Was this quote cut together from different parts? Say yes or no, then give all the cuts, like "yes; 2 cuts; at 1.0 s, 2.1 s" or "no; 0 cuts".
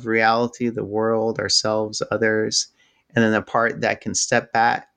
no; 0 cuts